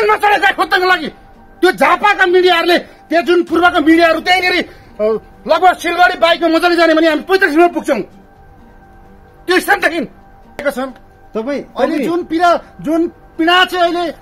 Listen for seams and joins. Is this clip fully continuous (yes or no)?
no